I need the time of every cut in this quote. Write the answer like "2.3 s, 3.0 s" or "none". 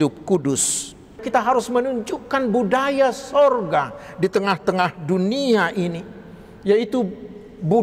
1.2 s